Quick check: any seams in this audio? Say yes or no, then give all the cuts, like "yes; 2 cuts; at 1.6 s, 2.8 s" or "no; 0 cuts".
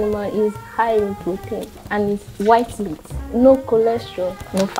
no; 0 cuts